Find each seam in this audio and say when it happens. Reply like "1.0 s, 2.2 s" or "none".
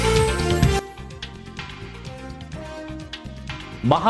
3.1 s